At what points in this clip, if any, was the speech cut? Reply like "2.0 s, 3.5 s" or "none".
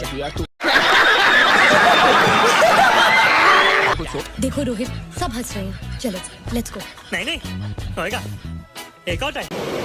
none